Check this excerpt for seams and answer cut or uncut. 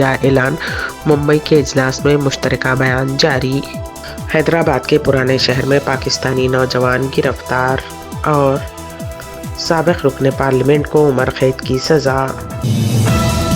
cut